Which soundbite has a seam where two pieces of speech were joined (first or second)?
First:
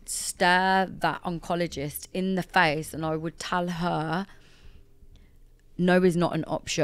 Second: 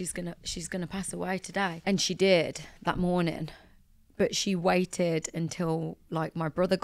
second